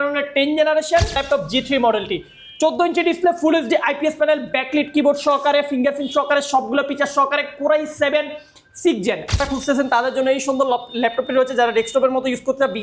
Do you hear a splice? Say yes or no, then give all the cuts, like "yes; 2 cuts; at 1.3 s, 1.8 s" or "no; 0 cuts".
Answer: yes; 2 cuts; at 1.2 s, 9.4 s